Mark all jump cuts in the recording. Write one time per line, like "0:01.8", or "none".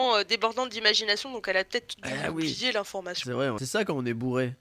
0:03.6